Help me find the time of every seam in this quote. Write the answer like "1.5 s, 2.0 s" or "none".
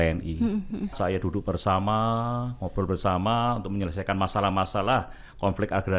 1.0 s